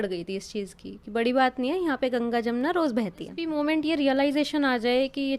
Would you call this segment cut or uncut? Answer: cut